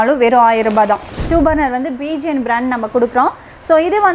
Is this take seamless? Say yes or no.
no